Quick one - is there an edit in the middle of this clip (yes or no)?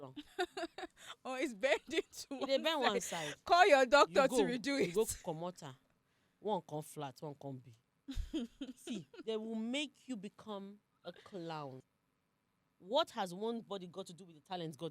yes